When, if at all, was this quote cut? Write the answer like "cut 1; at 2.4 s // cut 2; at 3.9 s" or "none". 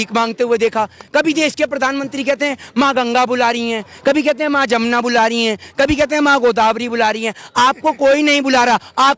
none

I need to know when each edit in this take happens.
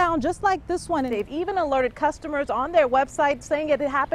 cut 1; at 1.1 s

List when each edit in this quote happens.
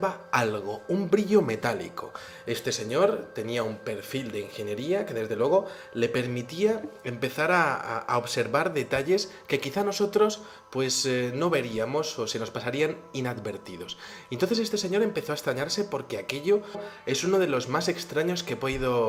none

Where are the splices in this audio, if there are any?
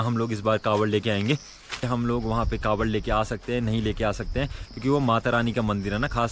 cut 1; at 1.8 s

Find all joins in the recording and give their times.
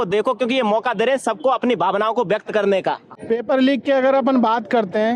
cut 1; at 3.2 s

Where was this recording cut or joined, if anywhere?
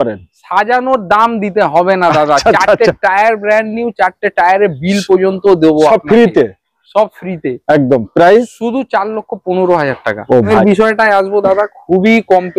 cut 1; at 10.5 s

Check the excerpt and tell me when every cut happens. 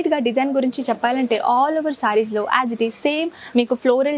none

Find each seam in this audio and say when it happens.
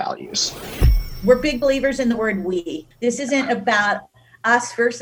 cut 1; at 1.0 s

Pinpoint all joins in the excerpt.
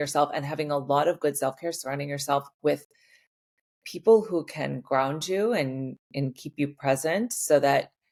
none

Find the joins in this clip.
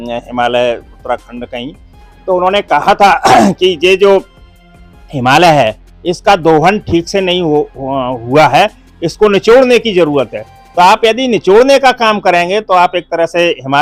none

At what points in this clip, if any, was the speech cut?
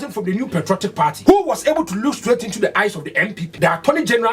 cut 1; at 1.2 s // cut 2; at 3.4 s

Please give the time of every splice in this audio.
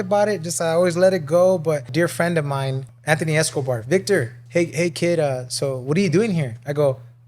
cut 1; at 1.9 s // cut 2; at 2.8 s // cut 3; at 4.4 s

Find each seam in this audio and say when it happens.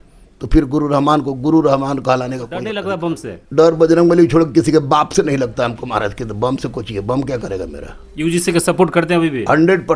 cut 1; at 2.8 s

